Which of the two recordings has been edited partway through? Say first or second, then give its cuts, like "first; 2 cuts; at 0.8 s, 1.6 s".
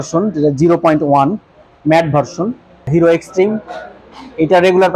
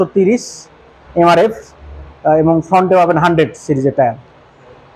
first; 1 cut; at 2.9 s